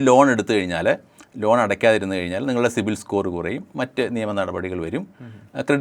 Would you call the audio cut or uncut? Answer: uncut